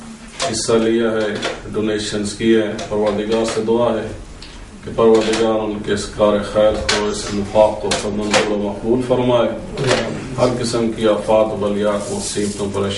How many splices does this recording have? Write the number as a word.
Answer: one